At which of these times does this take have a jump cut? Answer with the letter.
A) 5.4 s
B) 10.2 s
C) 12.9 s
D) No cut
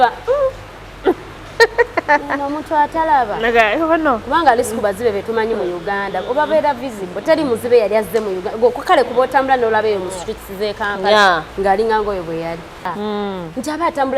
C